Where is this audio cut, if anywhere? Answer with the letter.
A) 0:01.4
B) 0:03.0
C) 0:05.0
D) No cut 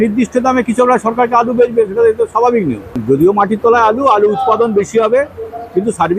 B